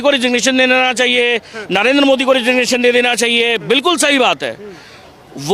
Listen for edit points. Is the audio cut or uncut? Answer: uncut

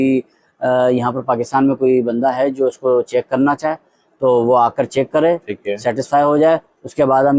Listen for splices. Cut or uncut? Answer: uncut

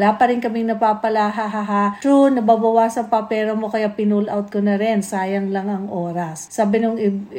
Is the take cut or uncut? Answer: uncut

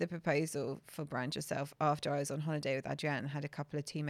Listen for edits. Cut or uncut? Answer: uncut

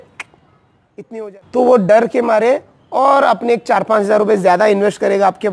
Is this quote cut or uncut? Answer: cut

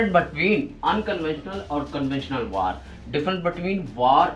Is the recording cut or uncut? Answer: uncut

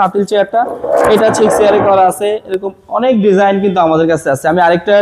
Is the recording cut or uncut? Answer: uncut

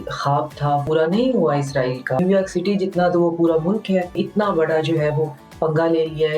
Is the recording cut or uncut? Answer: cut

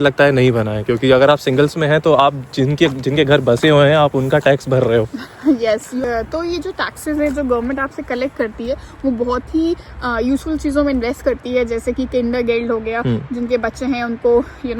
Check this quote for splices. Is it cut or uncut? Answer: uncut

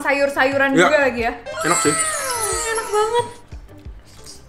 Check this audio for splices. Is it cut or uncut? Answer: uncut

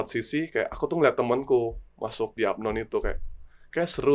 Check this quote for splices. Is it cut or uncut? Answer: cut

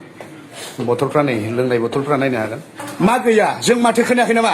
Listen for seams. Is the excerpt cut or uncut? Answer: cut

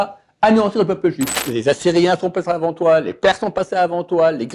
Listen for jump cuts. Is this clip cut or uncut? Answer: cut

